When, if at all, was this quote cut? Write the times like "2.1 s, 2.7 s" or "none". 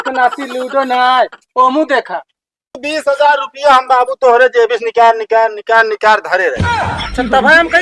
2.8 s